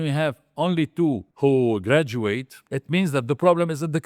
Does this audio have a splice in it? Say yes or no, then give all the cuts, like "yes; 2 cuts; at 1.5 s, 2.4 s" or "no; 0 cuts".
yes; 2 cuts; at 1.3 s, 2.6 s